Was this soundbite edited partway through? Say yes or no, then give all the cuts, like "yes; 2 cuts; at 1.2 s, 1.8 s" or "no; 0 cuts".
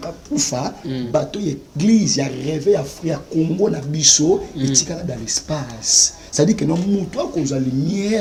no; 0 cuts